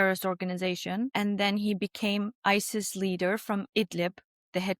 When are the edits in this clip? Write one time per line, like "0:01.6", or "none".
0:01.1